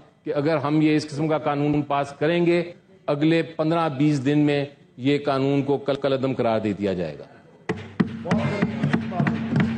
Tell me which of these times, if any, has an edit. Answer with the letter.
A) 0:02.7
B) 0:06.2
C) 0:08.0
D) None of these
D